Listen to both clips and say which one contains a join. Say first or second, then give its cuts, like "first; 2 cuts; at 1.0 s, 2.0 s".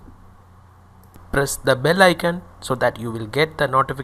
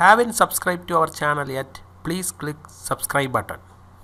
first; 1 cut; at 1.2 s